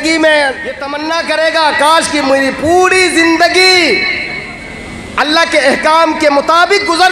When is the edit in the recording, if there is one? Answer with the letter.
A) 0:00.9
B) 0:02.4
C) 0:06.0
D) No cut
A